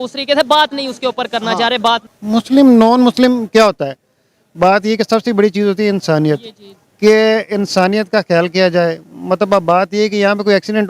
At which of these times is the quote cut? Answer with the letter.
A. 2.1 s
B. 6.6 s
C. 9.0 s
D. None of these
A